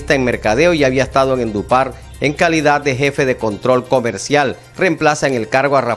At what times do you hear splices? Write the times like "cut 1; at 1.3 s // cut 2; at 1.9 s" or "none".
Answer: cut 1; at 4.6 s